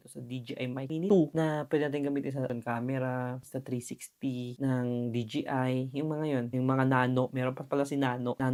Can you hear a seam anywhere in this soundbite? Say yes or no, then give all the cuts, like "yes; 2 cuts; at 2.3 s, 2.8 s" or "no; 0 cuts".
no; 0 cuts